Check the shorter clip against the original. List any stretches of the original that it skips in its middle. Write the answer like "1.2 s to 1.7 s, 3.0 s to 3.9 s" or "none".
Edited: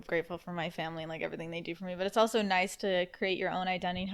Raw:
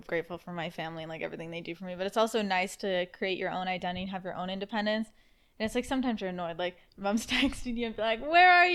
none